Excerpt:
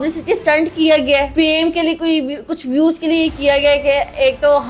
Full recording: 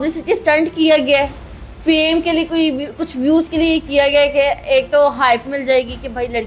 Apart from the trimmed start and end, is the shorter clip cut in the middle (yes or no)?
yes